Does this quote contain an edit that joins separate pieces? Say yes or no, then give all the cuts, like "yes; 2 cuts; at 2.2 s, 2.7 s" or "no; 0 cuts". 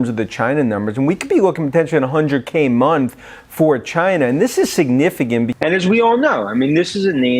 yes; 1 cut; at 5.5 s